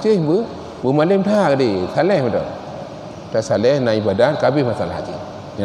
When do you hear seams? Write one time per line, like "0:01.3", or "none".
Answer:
none